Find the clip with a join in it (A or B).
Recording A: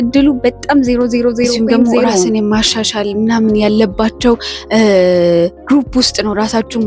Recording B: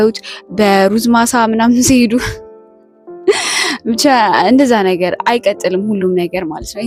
A